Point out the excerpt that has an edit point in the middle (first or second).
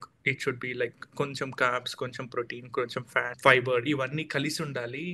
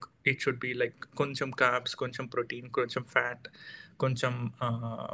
first